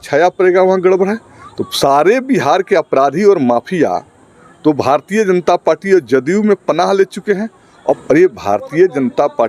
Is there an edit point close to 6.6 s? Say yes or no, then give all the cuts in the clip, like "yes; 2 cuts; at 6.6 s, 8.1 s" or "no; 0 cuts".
no; 1 cut; at 8.0 s